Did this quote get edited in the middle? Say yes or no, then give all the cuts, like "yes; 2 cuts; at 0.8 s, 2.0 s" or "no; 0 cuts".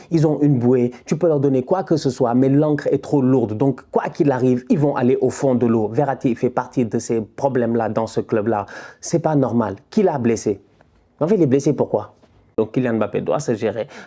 yes; 1 cut; at 12.4 s